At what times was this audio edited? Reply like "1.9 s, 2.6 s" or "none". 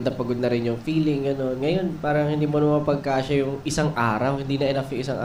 none